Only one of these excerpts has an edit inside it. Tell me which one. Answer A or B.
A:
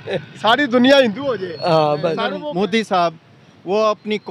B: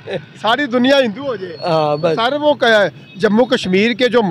A